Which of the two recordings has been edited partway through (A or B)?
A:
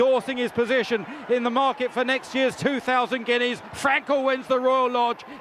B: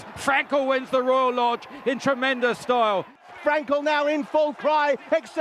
B